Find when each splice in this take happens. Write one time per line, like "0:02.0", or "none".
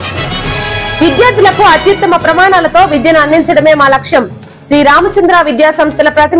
0:01.0